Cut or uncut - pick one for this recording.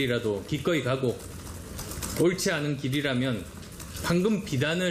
uncut